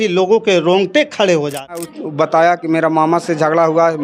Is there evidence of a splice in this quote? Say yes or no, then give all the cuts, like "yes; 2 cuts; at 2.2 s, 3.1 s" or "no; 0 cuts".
yes; 1 cut; at 1.9 s